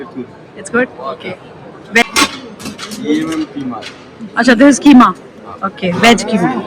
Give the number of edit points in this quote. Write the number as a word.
one